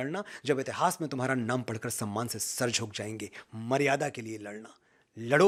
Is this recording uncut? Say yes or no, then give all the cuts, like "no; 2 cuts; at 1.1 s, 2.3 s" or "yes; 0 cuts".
yes; 0 cuts